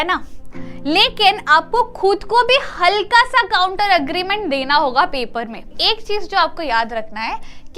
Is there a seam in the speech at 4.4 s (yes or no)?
no